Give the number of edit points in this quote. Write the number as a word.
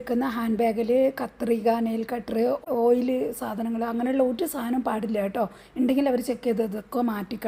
one